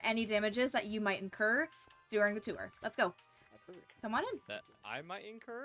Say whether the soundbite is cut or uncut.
uncut